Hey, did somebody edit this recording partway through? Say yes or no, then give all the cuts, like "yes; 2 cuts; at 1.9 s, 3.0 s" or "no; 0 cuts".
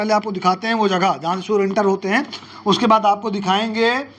no; 0 cuts